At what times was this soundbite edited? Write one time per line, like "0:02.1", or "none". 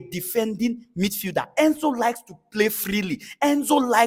none